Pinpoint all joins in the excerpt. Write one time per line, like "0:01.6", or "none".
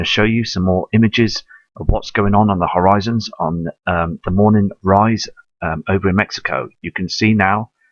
0:03.1